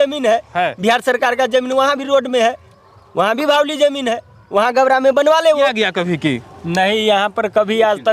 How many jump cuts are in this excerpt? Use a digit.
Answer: 1